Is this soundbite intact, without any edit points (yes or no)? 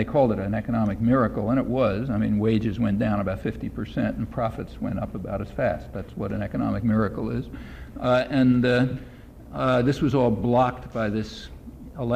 yes